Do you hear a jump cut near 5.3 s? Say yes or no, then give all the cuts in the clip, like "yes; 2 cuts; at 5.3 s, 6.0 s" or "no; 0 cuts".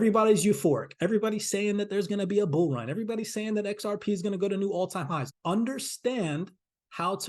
yes; 1 cut; at 5.3 s